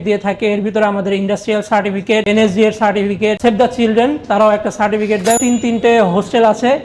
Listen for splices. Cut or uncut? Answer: cut